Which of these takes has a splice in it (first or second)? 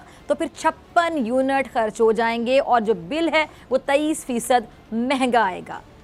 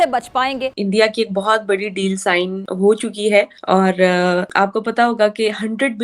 second